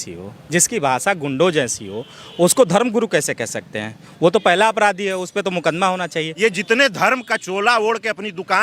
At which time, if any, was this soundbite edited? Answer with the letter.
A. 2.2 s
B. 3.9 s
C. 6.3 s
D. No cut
C